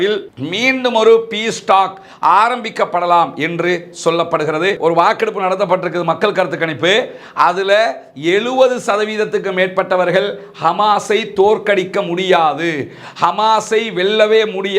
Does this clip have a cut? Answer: yes; 1 cut; at 4.8 s

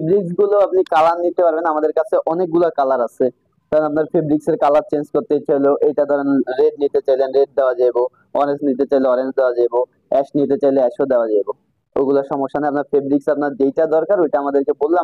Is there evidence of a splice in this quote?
no; 0 cuts

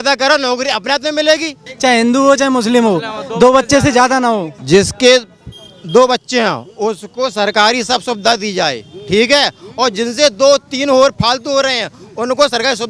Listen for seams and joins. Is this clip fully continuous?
no; 2 cuts; at 1.7 s, 4.5 s

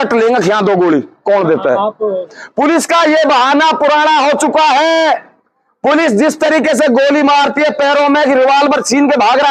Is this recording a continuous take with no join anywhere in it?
no; 1 cut; at 2.4 s

